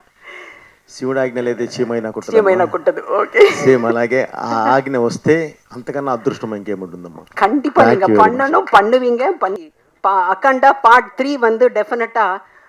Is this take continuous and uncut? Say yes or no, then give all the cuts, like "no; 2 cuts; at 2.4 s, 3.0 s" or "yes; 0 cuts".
no; 1 cut; at 9.6 s